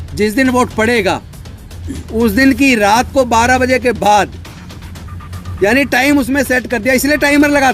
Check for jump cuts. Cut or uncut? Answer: uncut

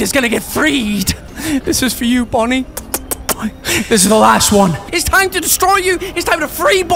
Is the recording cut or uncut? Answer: cut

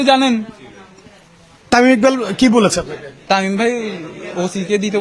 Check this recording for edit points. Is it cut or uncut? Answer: cut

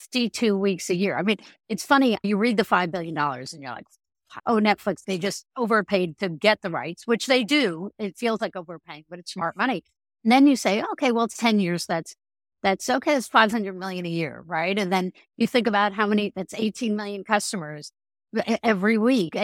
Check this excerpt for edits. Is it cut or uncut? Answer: cut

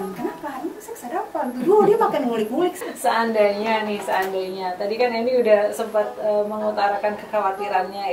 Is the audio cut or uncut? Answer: cut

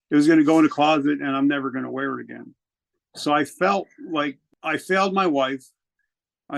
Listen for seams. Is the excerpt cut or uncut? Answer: cut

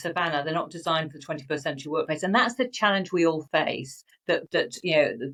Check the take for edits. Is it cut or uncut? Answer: uncut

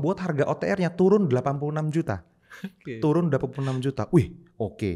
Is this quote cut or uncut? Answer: uncut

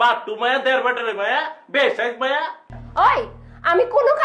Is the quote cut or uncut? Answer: cut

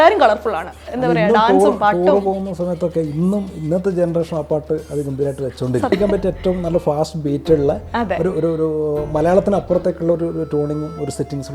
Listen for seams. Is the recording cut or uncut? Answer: cut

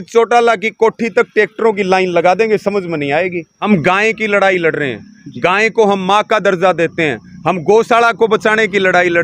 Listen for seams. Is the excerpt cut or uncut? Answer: cut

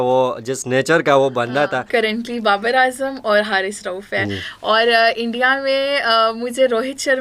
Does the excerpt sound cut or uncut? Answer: cut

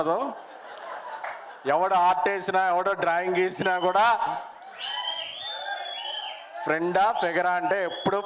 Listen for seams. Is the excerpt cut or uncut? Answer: uncut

